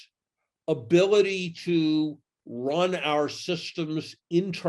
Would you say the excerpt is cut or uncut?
uncut